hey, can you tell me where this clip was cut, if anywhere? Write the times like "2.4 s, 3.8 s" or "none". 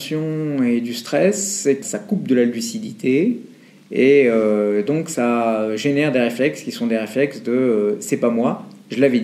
1.8 s